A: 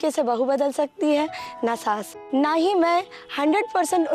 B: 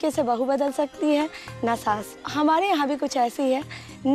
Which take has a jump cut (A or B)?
A